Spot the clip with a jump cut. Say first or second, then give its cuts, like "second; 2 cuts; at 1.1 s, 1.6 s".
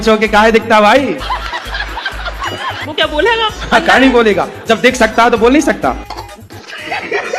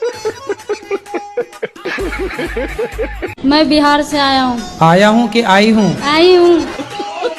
second; 1 cut; at 3.4 s